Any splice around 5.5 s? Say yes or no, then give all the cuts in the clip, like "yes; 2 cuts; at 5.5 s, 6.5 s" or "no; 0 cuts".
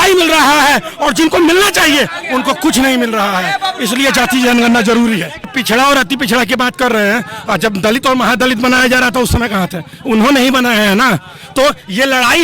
yes; 1 cut; at 5.5 s